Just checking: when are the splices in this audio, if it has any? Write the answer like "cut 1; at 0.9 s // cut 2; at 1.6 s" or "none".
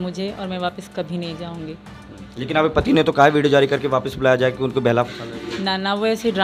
none